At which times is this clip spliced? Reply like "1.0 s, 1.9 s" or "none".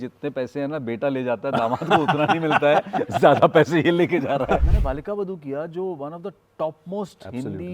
4.6 s

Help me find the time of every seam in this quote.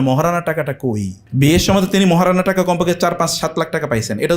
1.2 s

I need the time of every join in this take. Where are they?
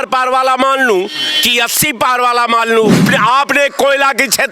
3.1 s

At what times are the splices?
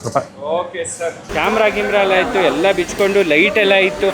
1.3 s

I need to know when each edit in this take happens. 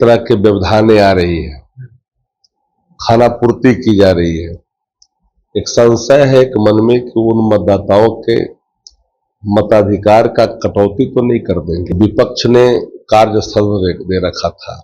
11.9 s

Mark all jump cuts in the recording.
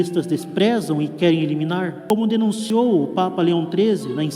2.0 s, 2.6 s

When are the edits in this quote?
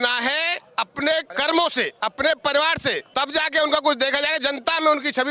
1.3 s, 1.9 s, 3.0 s

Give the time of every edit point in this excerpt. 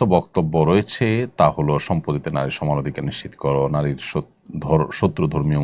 none

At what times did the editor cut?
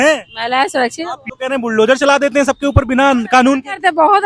1.1 s

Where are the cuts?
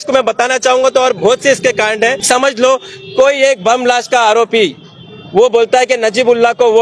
2.2 s

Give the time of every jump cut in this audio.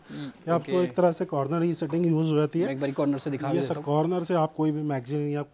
none

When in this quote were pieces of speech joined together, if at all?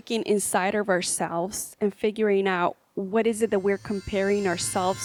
none

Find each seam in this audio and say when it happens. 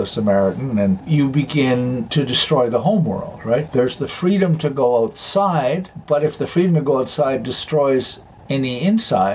1.0 s, 3.7 s

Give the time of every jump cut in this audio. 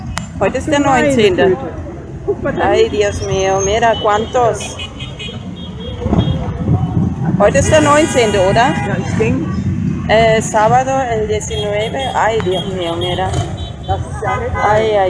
6.9 s

